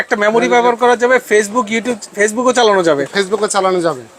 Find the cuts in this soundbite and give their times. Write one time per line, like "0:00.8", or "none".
none